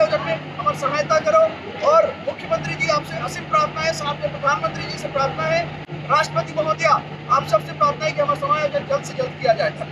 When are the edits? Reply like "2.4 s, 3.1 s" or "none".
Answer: none